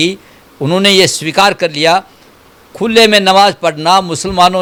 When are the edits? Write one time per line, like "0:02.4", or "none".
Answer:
none